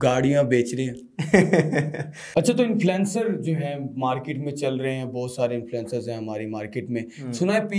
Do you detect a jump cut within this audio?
yes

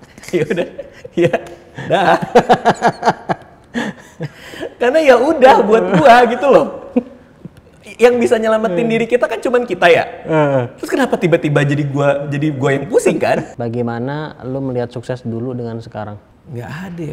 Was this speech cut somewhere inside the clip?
yes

